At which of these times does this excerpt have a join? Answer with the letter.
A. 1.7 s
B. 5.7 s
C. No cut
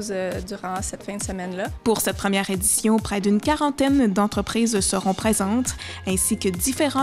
A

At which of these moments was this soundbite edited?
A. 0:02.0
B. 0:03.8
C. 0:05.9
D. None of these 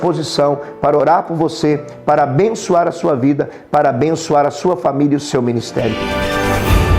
C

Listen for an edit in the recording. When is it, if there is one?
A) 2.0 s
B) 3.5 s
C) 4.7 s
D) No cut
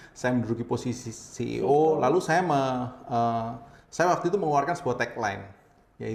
D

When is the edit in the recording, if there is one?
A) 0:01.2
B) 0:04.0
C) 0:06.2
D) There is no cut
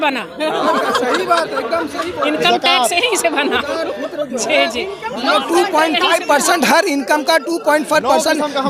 D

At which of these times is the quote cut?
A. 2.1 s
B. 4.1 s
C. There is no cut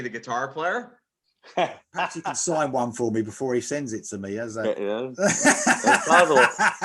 A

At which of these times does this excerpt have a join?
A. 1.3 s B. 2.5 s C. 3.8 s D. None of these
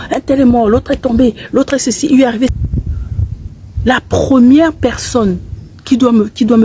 B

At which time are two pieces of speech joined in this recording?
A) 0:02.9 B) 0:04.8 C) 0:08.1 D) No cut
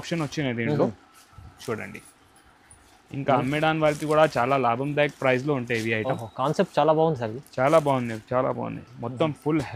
D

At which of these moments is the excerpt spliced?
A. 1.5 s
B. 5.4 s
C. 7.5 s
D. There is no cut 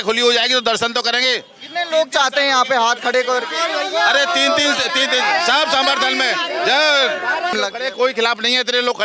C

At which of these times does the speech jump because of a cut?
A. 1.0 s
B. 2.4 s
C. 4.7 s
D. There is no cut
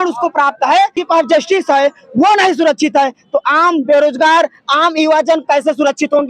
A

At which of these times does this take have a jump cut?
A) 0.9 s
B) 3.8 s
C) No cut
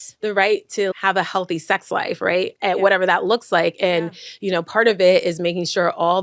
A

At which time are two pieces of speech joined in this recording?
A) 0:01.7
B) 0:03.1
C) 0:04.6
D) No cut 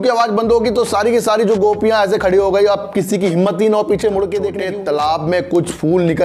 C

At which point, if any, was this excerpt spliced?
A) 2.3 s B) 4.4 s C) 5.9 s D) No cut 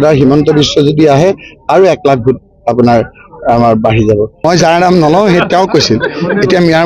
B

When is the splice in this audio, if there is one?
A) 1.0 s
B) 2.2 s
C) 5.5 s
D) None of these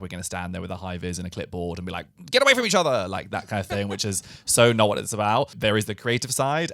C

